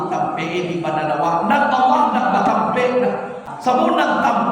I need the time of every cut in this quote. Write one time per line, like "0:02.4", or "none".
0:03.5